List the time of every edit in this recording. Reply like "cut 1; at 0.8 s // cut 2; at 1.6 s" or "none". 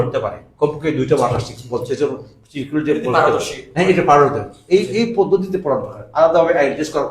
none

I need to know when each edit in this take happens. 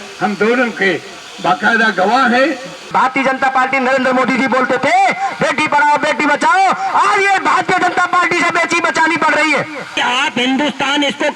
cut 1; at 2.9 s // cut 2; at 10.0 s

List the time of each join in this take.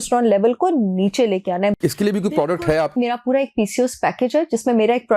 cut 1; at 1.8 s // cut 2; at 3.0 s

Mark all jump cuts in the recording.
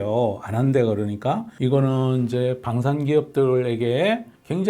cut 1; at 1.5 s

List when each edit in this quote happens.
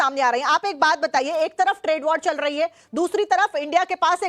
cut 1; at 2.2 s

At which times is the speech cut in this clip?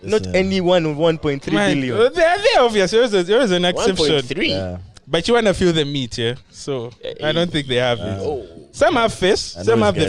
none

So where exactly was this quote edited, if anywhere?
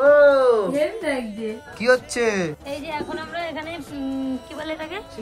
cut 1; at 1.7 s // cut 2; at 2.6 s

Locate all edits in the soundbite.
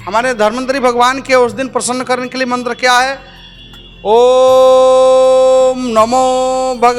none

